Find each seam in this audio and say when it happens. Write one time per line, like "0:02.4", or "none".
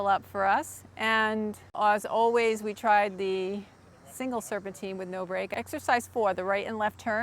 0:01.7
0:05.5

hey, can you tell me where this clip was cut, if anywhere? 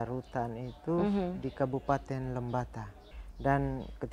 0:03.1

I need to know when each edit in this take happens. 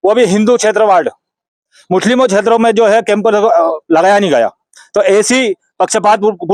none

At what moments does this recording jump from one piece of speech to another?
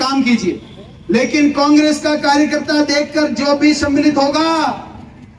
none

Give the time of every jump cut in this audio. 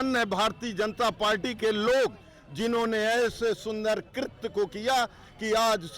none

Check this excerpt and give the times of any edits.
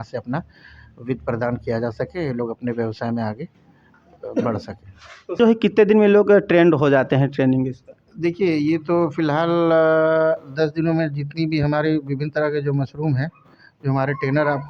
0:05.4

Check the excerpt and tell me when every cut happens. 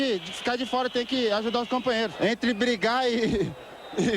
0:02.1

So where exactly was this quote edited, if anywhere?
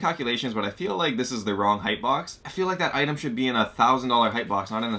none

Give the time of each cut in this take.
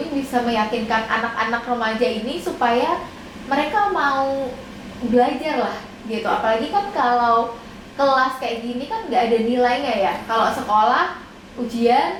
none

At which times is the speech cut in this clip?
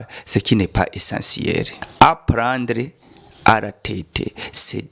0:01.8

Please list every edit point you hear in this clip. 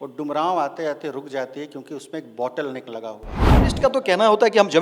0:03.4

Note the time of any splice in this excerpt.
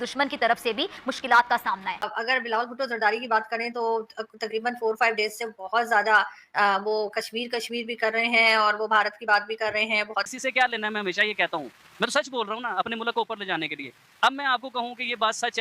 0:02.1
0:10.3

